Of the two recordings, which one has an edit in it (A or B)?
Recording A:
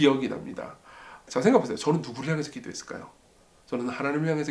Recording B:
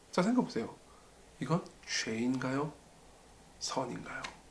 A